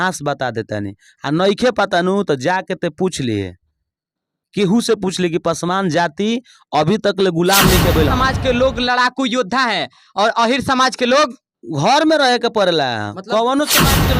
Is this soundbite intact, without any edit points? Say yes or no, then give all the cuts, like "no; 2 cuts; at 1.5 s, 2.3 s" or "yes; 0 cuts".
no; 1 cut; at 8.1 s